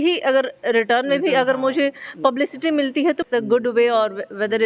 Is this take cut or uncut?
cut